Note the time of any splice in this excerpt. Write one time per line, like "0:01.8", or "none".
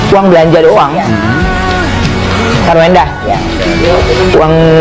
none